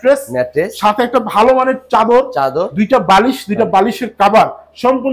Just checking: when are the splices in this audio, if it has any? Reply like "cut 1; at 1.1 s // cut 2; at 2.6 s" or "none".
none